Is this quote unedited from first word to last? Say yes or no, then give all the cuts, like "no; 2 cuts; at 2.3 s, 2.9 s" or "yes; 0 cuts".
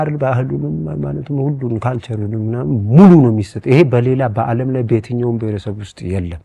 yes; 0 cuts